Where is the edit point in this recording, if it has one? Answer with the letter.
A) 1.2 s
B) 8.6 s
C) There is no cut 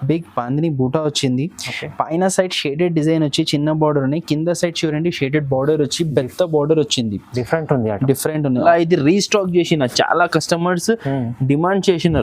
B